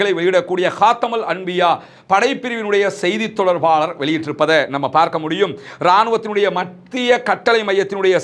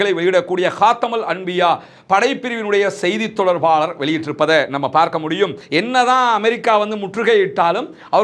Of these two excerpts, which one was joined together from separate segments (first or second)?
second